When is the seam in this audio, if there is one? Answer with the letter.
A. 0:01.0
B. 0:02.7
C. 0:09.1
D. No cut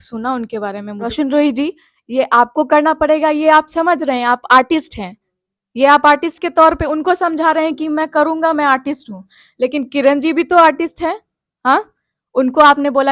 A